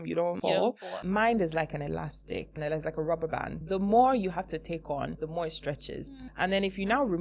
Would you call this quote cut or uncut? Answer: cut